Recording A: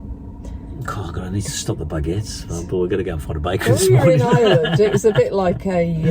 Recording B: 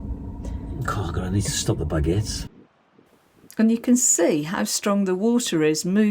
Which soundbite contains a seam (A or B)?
B